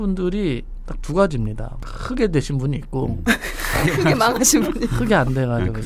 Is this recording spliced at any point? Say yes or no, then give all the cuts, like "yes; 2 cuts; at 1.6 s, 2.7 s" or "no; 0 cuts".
no; 0 cuts